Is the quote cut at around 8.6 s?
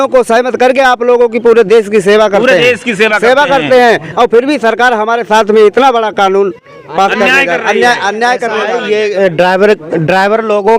yes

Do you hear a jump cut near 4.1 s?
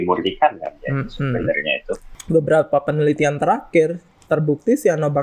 no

